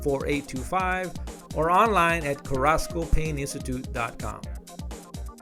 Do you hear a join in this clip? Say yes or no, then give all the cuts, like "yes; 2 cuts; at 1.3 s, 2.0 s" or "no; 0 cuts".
no; 0 cuts